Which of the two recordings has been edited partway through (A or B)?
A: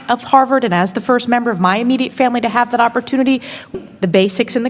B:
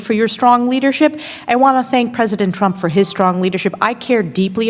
A